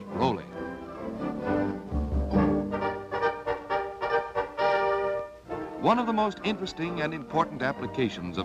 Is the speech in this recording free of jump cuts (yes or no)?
yes